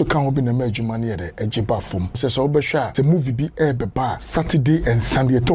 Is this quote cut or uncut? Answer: cut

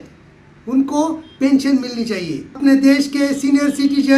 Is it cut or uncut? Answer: cut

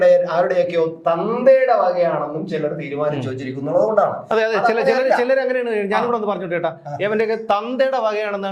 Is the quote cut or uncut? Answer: uncut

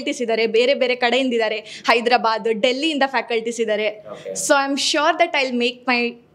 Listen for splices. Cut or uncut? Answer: uncut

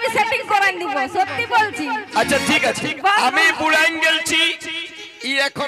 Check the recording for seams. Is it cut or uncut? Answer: cut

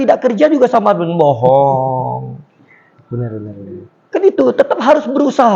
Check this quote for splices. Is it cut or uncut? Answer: uncut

